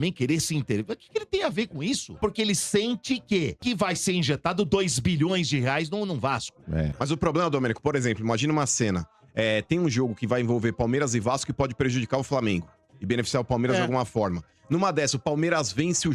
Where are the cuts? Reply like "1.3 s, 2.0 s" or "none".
2.2 s, 3.6 s, 7.0 s